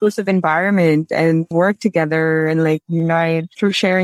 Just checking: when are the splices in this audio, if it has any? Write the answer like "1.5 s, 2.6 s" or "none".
1.5 s

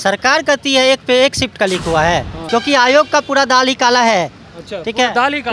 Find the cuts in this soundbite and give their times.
2.4 s

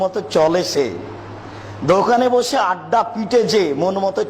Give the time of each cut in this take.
none

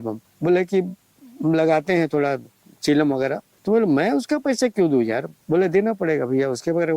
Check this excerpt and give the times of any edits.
3.5 s, 5.3 s

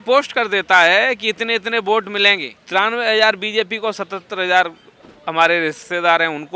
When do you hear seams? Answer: 2.5 s

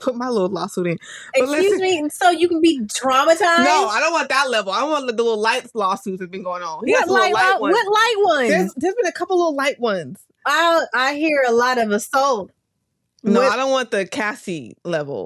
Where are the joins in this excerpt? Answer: none

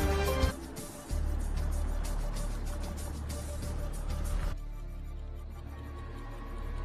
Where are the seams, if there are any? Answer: 4.6 s

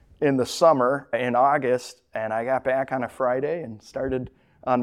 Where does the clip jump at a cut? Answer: none

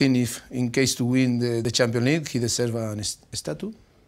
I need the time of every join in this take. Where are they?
1.6 s

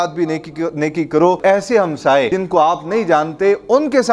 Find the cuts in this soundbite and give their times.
1.4 s, 2.3 s

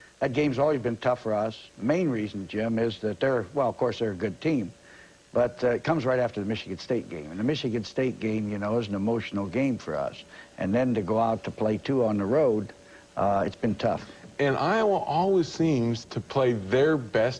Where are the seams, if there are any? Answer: 10.9 s

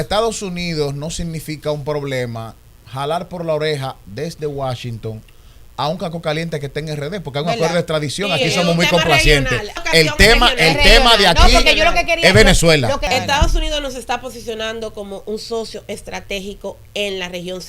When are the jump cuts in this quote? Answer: 9.8 s, 13.1 s

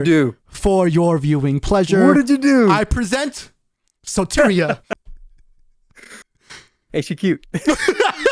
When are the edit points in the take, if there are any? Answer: none

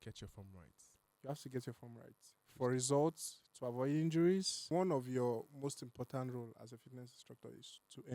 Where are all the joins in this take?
4.6 s

